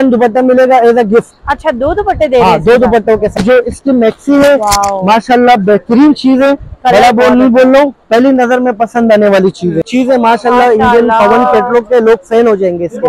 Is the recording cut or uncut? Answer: cut